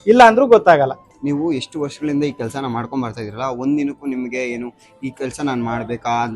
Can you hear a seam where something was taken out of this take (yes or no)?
yes